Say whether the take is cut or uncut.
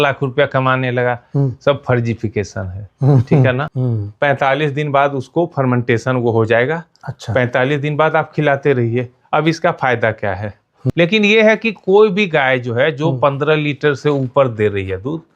cut